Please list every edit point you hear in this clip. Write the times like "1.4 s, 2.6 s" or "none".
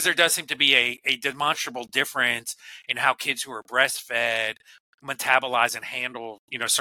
none